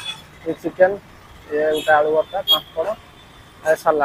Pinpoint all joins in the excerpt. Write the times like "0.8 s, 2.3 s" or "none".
none